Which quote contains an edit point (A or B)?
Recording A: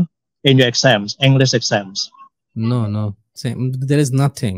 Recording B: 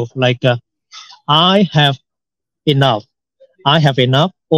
A